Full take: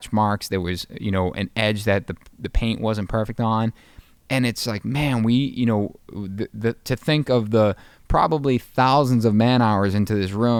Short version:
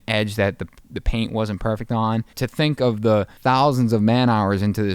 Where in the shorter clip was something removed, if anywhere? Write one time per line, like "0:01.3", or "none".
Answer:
0:02.3
0:03.3